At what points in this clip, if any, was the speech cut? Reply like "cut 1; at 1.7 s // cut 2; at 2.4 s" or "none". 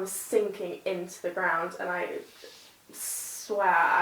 none